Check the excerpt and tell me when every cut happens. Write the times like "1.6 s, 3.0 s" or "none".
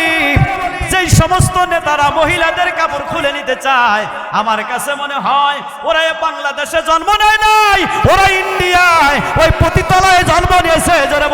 none